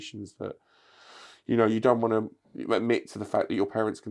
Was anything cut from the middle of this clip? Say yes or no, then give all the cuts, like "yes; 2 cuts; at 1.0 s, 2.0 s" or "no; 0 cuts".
no; 0 cuts